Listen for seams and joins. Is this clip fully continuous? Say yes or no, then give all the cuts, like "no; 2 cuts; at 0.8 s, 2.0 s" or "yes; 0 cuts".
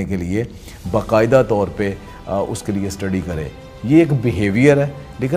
yes; 0 cuts